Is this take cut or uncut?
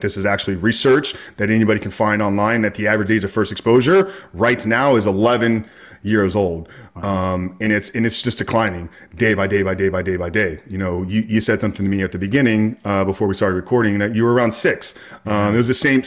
uncut